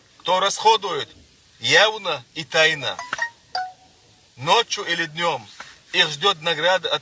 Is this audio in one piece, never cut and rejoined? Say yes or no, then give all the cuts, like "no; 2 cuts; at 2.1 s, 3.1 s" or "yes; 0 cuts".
yes; 0 cuts